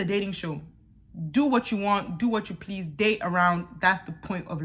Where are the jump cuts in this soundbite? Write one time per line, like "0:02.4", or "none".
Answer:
none